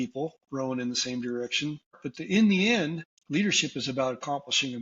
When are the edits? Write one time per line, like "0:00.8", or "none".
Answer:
0:02.1
0:03.1